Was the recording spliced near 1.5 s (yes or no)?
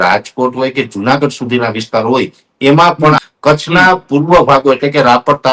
no